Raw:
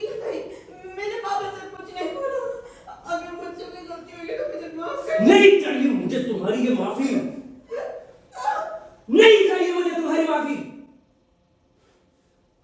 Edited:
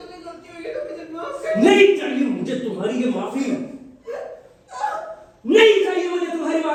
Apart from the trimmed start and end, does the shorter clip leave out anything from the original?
no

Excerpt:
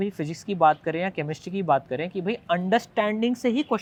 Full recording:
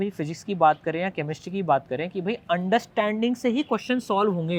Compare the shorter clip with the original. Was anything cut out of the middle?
no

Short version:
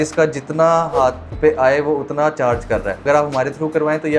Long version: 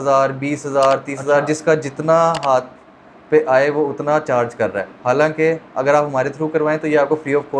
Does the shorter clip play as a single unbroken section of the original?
no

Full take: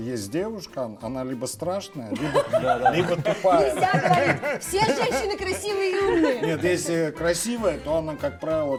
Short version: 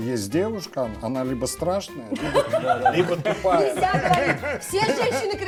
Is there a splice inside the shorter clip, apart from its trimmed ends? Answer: no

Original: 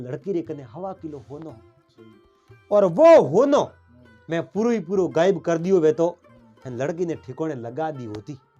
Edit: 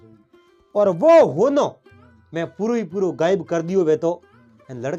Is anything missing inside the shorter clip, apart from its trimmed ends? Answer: no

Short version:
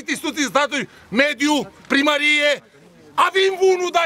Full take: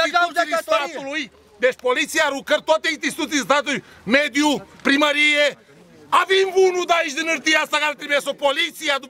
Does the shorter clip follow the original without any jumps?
yes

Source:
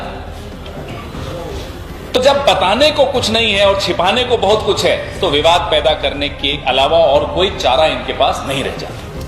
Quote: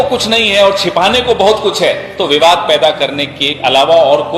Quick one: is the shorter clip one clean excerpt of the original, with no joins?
yes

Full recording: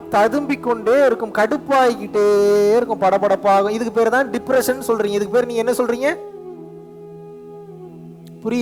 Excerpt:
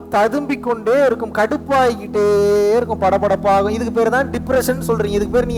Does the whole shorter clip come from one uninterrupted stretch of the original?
yes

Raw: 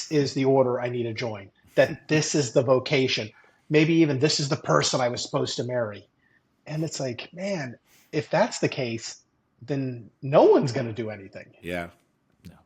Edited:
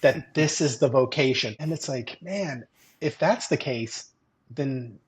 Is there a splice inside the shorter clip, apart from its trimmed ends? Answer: yes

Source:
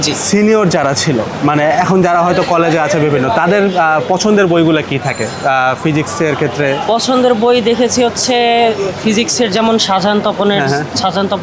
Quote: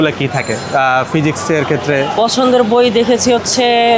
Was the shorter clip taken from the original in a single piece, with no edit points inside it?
yes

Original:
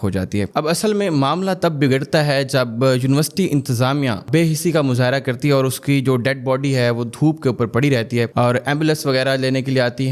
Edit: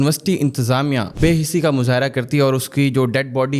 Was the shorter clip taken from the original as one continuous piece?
yes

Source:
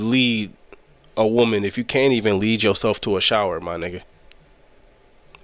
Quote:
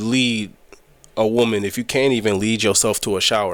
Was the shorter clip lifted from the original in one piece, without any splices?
yes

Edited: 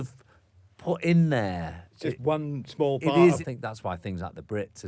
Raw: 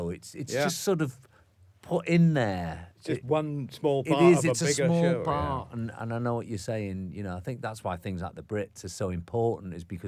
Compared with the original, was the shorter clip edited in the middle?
yes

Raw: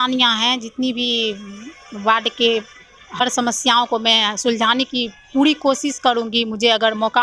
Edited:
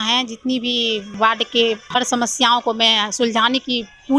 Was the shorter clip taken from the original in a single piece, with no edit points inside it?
no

